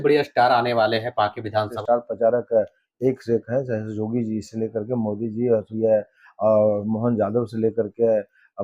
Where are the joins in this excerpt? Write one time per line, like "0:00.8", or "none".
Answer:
0:01.8